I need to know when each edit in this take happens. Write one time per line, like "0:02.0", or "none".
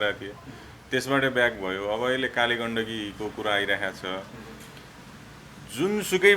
none